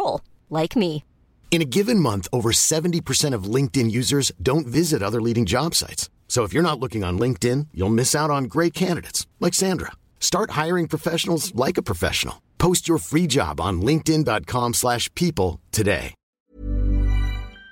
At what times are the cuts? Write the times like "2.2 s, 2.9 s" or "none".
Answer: 16.5 s